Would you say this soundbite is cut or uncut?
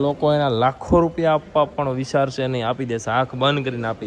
uncut